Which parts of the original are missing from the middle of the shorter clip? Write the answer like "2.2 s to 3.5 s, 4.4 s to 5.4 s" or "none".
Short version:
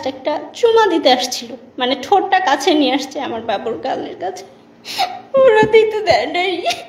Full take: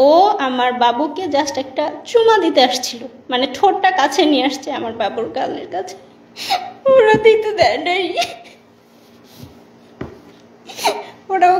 none

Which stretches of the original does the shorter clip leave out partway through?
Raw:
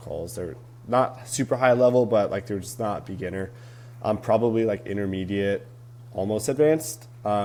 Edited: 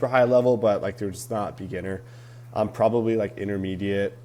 none

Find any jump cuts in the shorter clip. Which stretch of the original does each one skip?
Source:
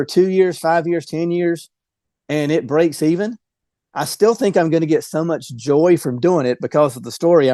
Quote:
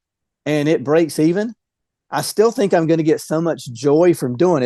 none

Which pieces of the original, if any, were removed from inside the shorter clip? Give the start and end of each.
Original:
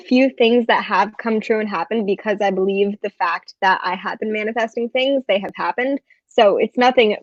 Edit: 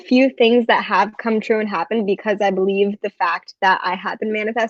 none

